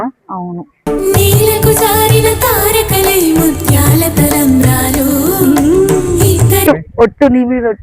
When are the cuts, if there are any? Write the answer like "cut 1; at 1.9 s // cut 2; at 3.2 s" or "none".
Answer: cut 1; at 6.6 s